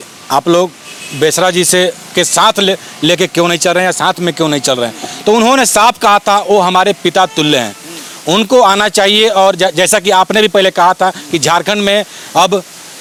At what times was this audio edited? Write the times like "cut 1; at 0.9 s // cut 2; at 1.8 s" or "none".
none